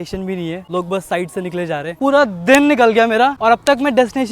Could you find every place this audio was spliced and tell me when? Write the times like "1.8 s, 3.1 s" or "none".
1.9 s